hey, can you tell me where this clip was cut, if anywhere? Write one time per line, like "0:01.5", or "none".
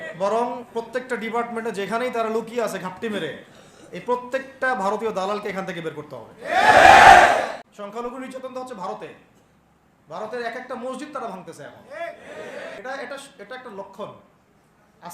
0:07.6
0:12.2